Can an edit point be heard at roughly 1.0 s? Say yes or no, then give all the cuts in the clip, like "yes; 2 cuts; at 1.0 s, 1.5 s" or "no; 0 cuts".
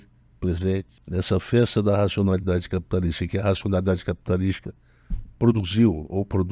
yes; 1 cut; at 1.0 s